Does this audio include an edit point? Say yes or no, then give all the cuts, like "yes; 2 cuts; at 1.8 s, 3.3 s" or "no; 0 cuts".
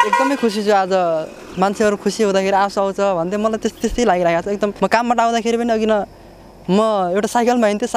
yes; 1 cut; at 4.7 s